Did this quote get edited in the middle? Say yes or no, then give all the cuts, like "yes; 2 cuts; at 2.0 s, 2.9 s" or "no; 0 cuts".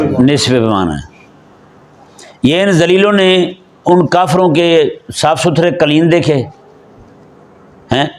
no; 0 cuts